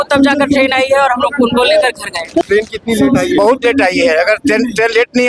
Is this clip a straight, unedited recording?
no; 1 cut; at 2.4 s

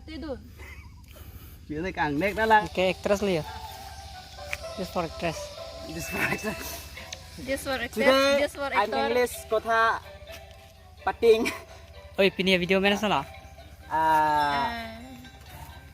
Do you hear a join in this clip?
yes; 1 cut; at 2.6 s

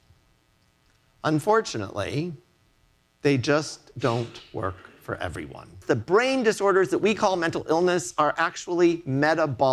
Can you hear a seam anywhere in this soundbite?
yes; 1 cut; at 5.8 s

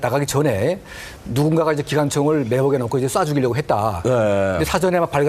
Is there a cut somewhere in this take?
yes; 1 cut; at 4.0 s

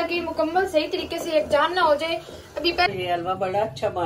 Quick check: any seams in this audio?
yes; 1 cut; at 2.9 s

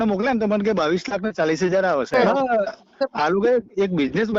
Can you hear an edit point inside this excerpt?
yes; 1 cut; at 2.1 s

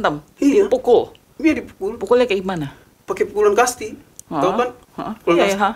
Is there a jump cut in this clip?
no; 0 cuts

